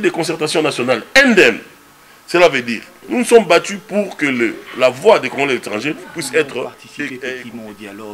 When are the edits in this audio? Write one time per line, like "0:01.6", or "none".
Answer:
0:07.2

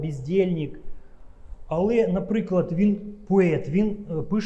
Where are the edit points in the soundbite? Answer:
none

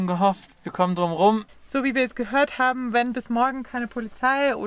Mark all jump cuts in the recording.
0:01.6

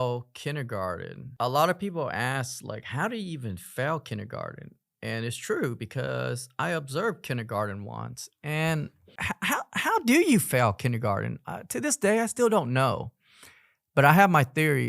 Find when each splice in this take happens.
0:01.3
0:09.1

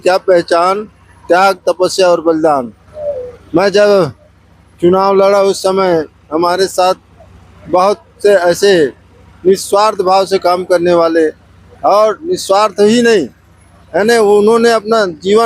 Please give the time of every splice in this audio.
none

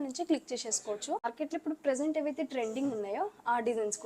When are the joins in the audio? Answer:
0:01.3

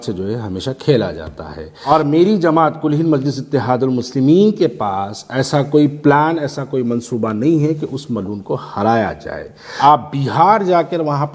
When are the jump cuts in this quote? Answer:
0:01.9
0:09.7

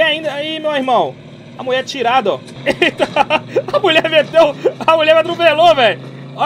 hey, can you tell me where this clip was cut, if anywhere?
0:02.5

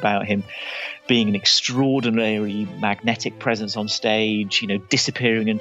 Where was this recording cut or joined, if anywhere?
none

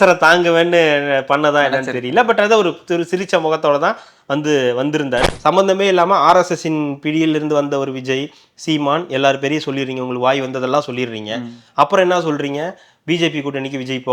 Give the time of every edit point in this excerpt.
0:05.2

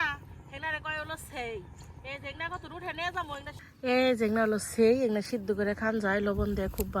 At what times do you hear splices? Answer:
0:03.7

